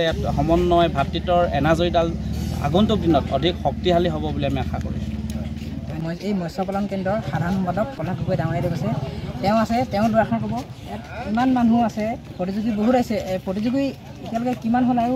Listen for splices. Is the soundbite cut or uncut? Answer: uncut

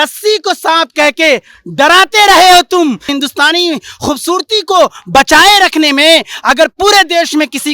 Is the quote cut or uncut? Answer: cut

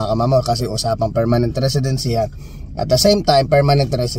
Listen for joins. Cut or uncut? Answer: uncut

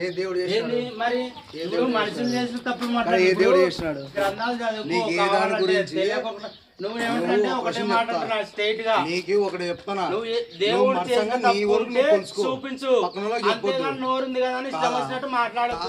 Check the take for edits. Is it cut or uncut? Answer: cut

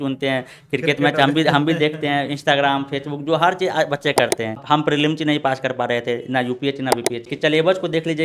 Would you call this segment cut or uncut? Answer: cut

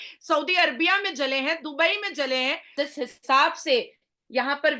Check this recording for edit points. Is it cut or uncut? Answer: cut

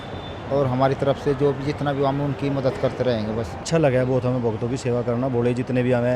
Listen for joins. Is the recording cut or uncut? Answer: cut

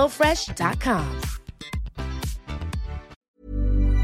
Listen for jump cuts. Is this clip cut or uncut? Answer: cut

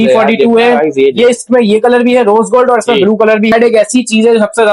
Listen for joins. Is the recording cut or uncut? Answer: cut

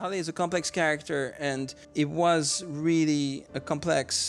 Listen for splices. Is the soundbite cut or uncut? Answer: cut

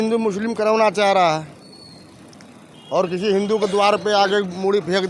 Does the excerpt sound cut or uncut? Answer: uncut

